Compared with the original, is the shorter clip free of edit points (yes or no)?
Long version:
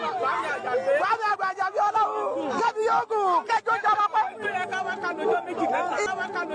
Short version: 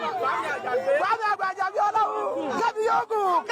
yes